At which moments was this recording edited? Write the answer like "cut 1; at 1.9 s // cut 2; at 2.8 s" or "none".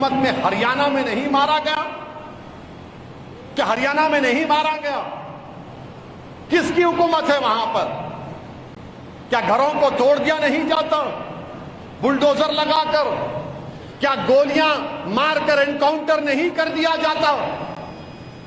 none